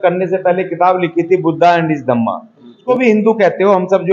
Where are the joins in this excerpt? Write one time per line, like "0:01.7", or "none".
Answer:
0:02.8